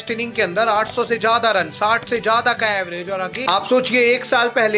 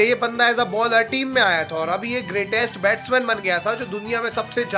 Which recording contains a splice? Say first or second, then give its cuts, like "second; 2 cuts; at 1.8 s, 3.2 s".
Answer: first; 1 cut; at 3.4 s